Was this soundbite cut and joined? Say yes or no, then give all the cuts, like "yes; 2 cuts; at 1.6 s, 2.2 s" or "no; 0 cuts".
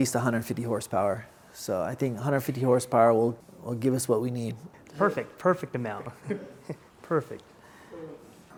no; 0 cuts